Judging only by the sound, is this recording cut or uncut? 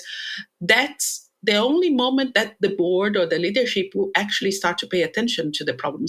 uncut